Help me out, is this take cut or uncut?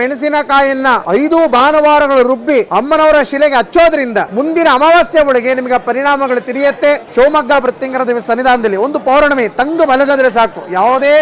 cut